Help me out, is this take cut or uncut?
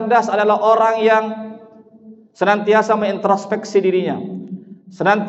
uncut